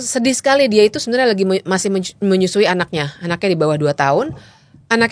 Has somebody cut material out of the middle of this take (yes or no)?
no